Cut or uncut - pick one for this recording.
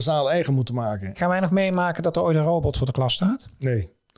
cut